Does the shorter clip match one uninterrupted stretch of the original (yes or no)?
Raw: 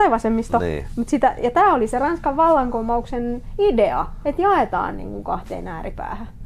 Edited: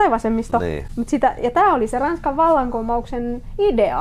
yes